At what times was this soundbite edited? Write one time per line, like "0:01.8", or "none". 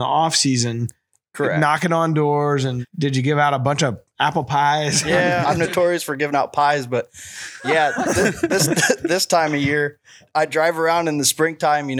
0:02.8
0:05.4
0:10.2